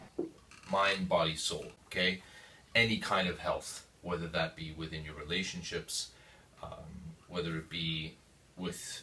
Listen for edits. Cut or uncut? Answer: uncut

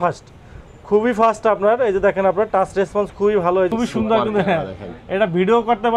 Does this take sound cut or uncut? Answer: cut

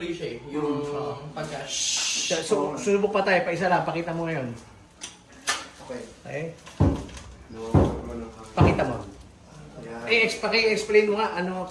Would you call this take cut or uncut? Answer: uncut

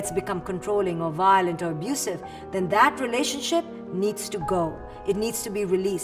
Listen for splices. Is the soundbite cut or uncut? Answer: cut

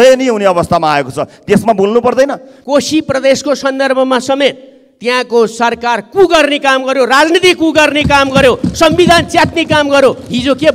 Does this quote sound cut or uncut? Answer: cut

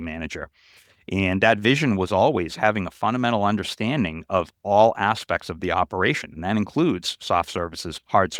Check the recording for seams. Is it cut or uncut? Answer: uncut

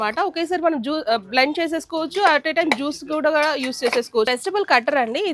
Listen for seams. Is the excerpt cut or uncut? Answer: cut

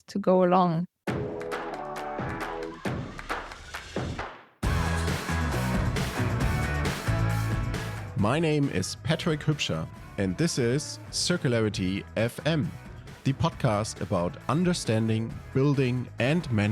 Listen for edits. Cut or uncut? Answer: cut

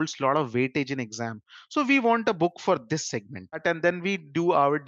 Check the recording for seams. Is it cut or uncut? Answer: cut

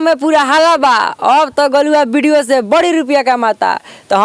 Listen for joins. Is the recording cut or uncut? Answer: uncut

